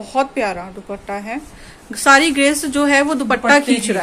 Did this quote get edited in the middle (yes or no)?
no